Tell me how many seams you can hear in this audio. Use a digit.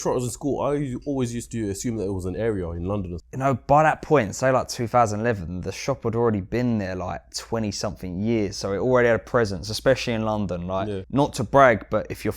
2